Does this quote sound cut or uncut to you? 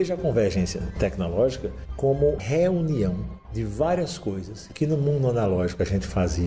cut